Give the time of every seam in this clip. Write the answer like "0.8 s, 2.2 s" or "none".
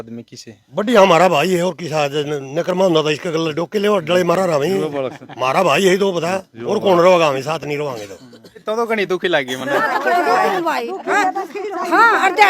8.6 s